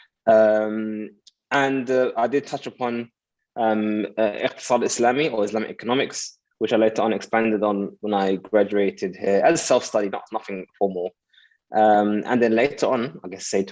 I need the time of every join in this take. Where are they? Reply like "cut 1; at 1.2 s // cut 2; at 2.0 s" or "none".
none